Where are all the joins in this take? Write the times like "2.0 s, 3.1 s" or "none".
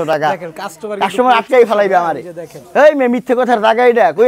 none